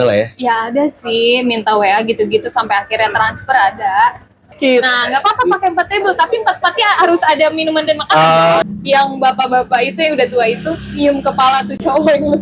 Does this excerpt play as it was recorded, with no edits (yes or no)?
no